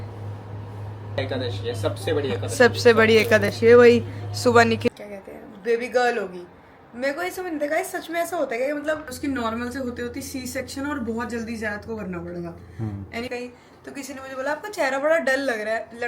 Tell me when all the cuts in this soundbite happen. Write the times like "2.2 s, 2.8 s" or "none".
1.2 s, 4.9 s, 9.1 s, 13.3 s